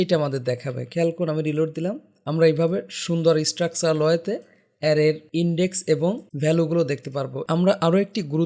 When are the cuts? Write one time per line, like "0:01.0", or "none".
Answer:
0:02.1
0:05.2
0:06.3
0:07.4